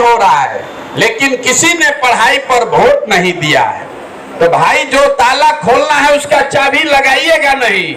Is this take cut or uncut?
uncut